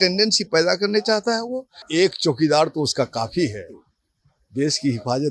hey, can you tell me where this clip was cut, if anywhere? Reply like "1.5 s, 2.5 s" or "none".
1.8 s